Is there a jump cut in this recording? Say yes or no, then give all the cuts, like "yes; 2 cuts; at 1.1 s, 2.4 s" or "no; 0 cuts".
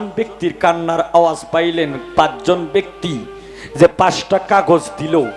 no; 0 cuts